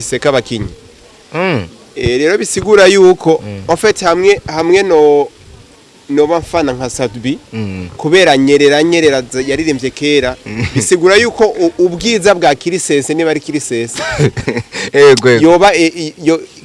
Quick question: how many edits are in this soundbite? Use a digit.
0